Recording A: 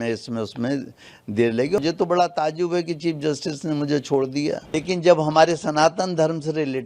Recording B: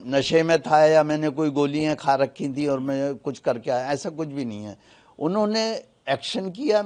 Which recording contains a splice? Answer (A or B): A